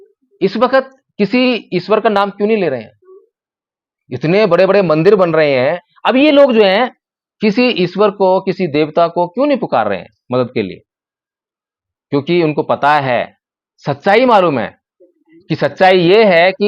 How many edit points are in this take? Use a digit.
1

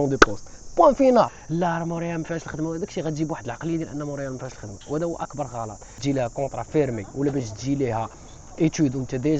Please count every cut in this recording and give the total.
2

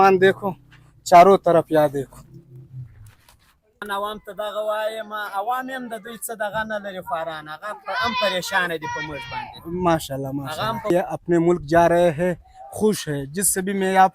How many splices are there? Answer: 2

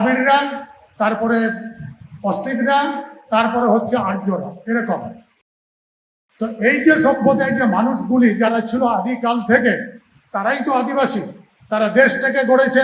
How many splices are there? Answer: 1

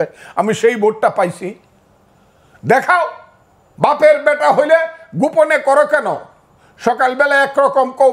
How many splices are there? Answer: 0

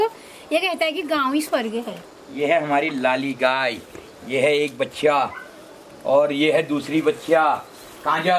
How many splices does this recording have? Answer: 0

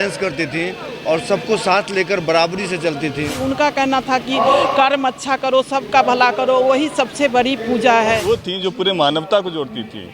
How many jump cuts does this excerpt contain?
2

